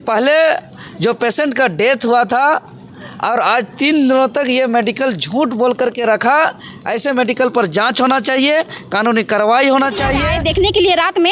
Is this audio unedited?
no; 1 cut; at 10.3 s

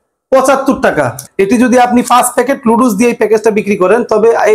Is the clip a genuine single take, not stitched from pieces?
no; 1 cut; at 1.2 s

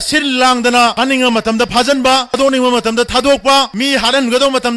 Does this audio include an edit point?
yes; 3 cuts; at 0.9 s, 2.3 s, 3.7 s

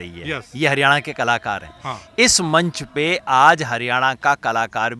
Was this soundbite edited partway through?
no; 0 cuts

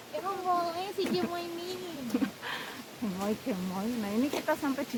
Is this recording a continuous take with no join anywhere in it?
yes; 0 cuts

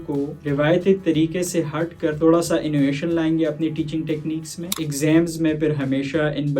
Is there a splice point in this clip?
yes; 1 cut; at 4.7 s

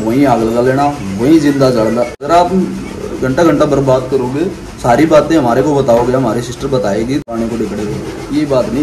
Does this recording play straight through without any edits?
no; 2 cuts; at 2.2 s, 7.2 s

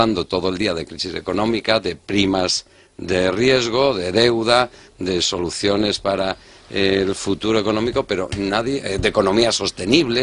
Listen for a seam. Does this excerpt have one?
yes; 1 cut; at 2.6 s

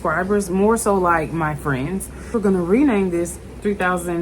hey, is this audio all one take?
no; 1 cut; at 2.3 s

